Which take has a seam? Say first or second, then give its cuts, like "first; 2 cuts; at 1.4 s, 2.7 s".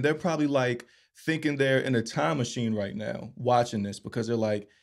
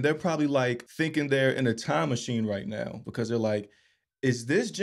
second; 2 cuts; at 0.9 s, 3.0 s